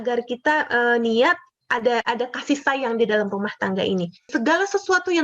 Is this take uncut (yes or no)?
no